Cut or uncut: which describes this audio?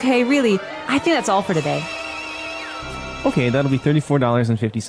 cut